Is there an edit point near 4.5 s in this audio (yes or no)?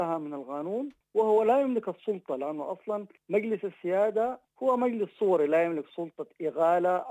yes